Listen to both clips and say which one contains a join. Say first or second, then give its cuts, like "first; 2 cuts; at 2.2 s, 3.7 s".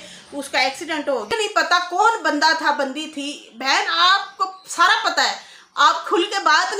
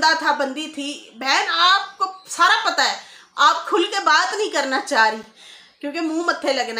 first; 1 cut; at 1.4 s